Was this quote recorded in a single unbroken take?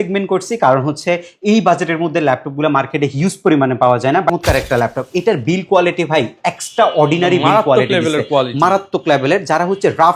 no; 1 cut; at 4.3 s

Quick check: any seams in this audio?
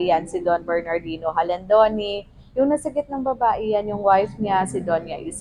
no; 0 cuts

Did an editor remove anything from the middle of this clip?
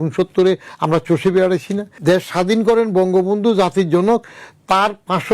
yes; 1 cut; at 1.9 s

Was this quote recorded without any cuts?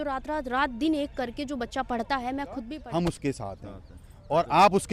no; 1 cut; at 2.8 s

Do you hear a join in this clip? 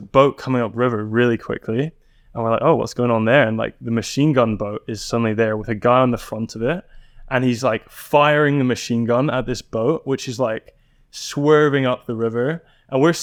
no; 0 cuts

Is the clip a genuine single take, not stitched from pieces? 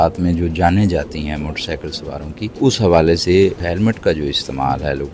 no; 2 cuts; at 2.6 s, 3.6 s

